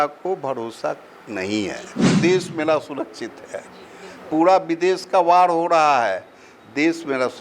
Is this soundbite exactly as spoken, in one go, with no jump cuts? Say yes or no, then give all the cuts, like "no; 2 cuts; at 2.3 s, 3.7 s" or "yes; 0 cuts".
no; 1 cut; at 2.1 s